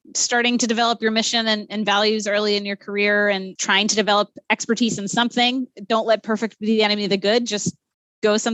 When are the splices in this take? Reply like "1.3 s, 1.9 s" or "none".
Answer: none